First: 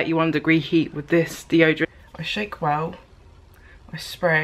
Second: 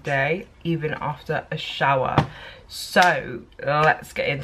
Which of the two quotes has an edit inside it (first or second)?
first